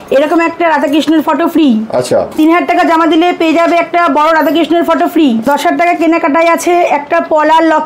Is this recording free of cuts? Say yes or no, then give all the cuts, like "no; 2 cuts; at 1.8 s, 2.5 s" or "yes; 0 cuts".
no; 2 cuts; at 2.3 s, 5.5 s